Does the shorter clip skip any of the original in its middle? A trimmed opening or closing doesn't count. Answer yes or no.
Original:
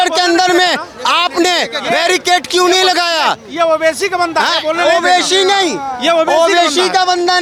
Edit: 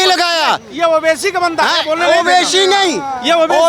no